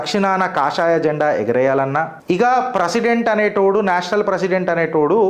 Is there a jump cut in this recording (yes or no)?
yes